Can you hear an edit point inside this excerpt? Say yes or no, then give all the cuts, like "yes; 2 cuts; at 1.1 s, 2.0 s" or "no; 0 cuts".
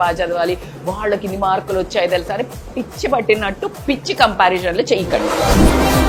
no; 0 cuts